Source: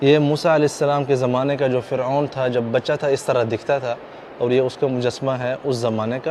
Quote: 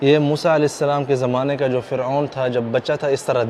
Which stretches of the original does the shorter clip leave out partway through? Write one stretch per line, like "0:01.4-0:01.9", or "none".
none